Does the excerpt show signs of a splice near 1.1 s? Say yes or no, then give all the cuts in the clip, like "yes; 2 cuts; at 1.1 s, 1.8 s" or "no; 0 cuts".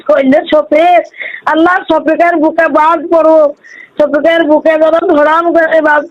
no; 0 cuts